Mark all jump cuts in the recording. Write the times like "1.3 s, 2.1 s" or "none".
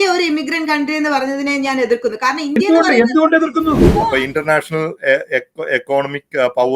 3.9 s

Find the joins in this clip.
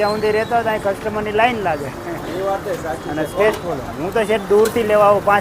none

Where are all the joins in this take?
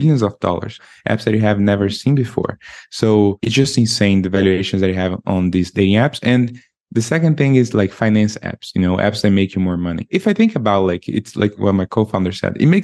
0.8 s, 3.4 s, 10.0 s, 11.6 s

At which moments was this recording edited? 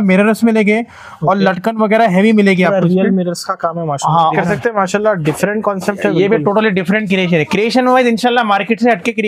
4.3 s

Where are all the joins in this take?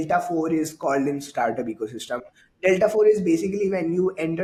none

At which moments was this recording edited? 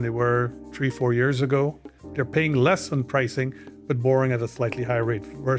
none

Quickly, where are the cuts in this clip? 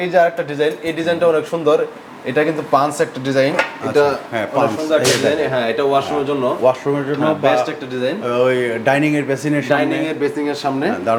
none

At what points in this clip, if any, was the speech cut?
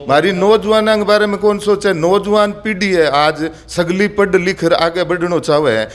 none

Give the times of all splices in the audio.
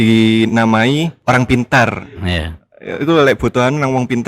1.2 s

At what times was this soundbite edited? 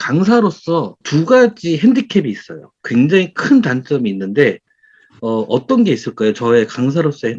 1.0 s

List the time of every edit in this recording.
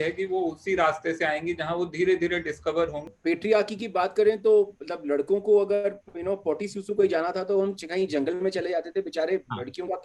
3.1 s

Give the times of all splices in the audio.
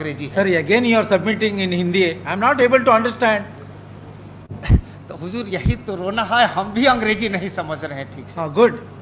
none

